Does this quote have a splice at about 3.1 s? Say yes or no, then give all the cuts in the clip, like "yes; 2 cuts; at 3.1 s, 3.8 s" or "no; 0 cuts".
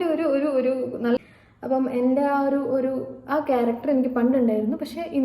no; 1 cut; at 1.2 s